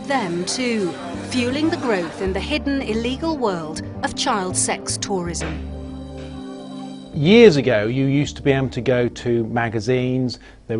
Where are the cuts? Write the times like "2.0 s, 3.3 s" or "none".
none